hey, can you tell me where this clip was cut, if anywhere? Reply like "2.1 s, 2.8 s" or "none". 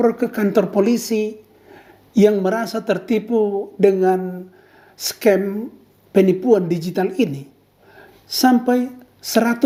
none